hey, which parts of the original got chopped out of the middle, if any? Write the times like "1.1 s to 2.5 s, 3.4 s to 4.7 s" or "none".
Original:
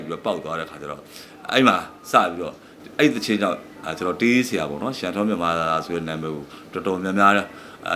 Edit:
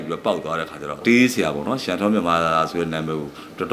1.0 s to 4.2 s